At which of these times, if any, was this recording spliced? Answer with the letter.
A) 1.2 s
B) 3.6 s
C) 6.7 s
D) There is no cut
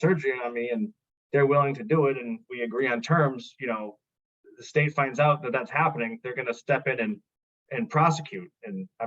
D